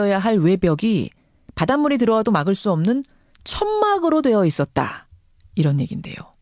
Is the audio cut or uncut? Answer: cut